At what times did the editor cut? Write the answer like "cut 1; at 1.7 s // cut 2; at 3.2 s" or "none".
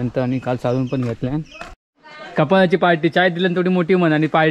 cut 1; at 1.8 s